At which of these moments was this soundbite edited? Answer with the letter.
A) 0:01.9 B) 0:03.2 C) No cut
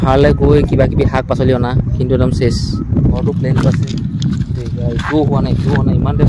B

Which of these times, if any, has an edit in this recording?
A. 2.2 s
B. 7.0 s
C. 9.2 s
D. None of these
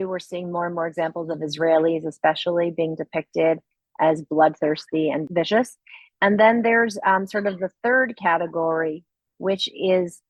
D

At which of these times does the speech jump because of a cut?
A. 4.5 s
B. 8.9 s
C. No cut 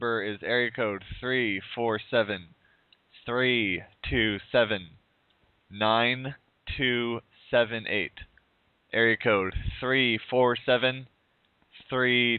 A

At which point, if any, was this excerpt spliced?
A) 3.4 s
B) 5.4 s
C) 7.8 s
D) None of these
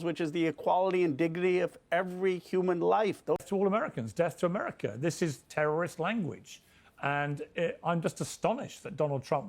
A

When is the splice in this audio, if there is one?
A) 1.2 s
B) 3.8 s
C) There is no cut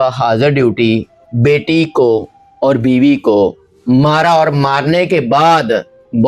C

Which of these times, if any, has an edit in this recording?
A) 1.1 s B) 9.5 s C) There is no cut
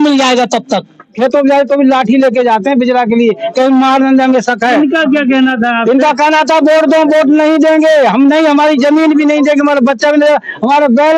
A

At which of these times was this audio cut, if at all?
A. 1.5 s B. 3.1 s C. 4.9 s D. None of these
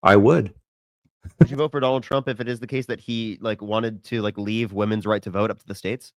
A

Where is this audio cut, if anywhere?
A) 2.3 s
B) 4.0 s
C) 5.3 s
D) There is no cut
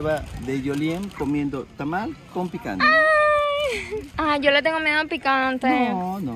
D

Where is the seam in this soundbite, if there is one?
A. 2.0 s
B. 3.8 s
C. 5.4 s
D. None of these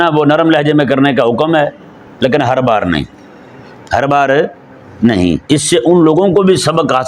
C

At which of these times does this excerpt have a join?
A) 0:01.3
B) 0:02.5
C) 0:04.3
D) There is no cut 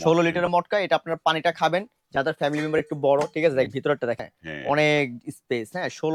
C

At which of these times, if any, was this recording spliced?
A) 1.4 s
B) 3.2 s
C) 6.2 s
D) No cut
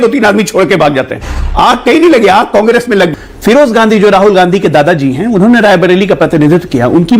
B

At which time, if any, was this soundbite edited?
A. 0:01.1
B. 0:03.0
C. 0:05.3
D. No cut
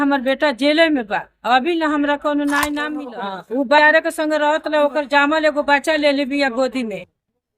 B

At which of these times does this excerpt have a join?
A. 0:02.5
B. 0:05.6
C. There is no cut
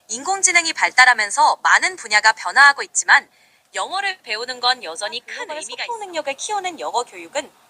B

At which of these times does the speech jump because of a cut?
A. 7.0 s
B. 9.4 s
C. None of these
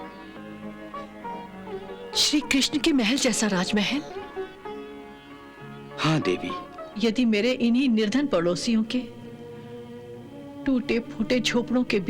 A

